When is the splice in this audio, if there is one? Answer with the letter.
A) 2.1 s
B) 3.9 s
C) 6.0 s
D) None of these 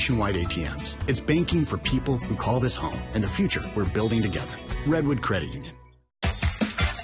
C